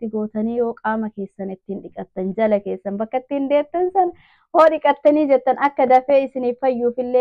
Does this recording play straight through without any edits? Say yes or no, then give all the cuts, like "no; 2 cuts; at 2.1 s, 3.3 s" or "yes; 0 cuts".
yes; 0 cuts